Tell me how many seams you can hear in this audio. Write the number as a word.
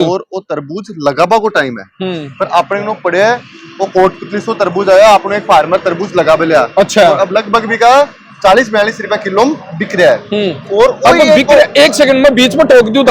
zero